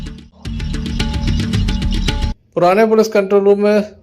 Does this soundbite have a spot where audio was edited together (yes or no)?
yes